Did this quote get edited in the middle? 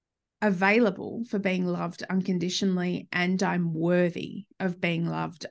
no; 0 cuts

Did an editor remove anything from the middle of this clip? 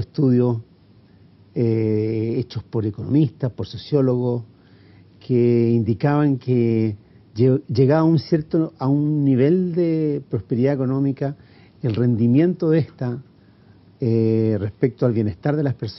yes; 1 cut; at 3.3 s

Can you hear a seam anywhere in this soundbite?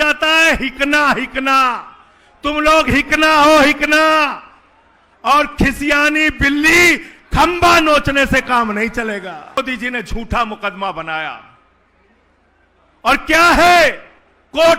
yes; 1 cut; at 9.6 s

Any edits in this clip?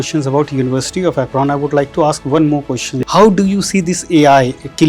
yes; 1 cut; at 3.0 s

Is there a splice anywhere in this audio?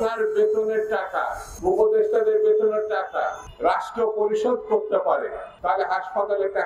yes; 3 cuts; at 1.4 s, 3.4 s, 5.5 s

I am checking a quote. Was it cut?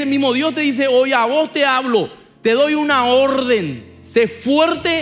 yes; 1 cut; at 2.2 s

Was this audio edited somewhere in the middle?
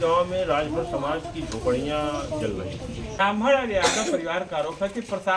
no; 0 cuts

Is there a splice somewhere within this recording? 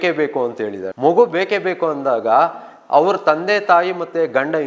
no; 0 cuts

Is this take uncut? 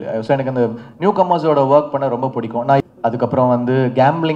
no; 1 cut; at 2.8 s

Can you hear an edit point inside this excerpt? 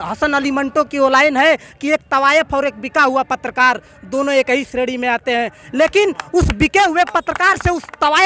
no; 0 cuts

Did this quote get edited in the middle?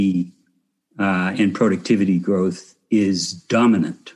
no; 0 cuts

